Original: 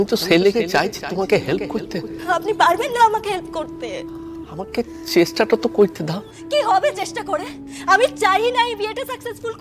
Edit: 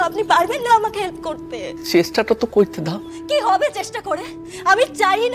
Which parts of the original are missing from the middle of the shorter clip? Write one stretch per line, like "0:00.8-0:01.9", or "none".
0:04.1-0:05.0